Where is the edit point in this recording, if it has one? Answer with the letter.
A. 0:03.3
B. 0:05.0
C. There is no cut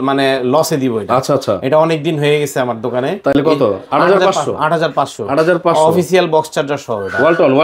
C